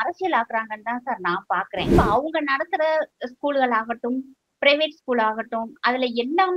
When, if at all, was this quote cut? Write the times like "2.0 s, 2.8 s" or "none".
1.9 s